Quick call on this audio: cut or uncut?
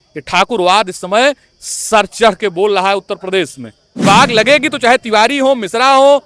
cut